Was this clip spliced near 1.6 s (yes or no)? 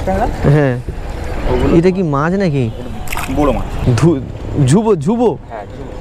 no